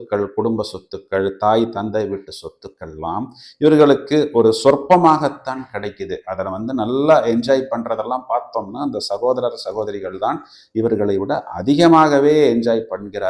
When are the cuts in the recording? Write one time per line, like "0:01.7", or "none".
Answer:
none